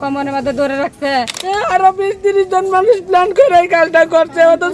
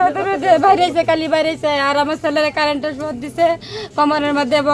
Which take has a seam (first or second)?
first